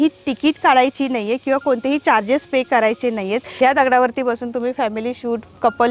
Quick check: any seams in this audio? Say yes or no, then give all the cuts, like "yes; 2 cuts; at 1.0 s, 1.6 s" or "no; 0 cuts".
yes; 1 cut; at 3.5 s